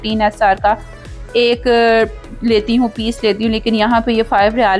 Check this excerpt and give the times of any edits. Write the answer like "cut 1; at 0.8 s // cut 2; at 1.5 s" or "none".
none